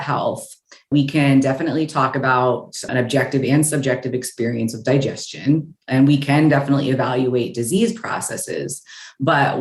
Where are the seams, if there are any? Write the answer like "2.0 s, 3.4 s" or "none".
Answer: 0.9 s